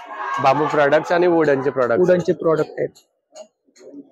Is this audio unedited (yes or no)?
yes